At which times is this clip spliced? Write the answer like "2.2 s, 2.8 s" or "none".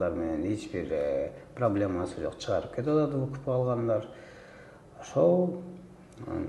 none